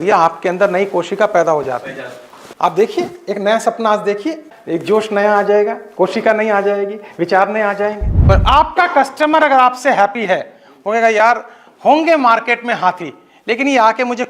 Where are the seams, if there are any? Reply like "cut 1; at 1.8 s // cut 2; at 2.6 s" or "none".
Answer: cut 1; at 8.2 s